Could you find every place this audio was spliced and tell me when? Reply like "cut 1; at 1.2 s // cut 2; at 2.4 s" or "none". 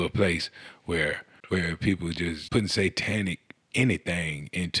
cut 1; at 1.3 s // cut 2; at 2.4 s